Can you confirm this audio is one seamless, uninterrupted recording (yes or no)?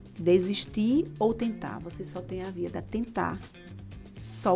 yes